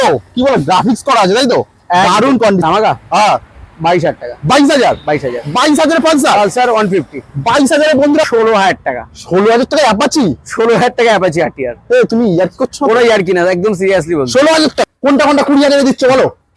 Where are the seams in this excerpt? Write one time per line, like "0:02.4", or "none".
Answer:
0:02.6
0:08.3
0:14.8